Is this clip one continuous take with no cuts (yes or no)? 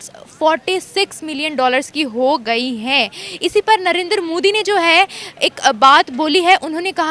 yes